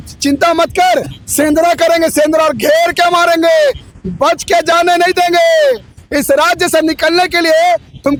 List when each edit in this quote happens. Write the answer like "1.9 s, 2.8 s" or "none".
none